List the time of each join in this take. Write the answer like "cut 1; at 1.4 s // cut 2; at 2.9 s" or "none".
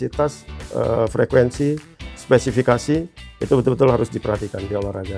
none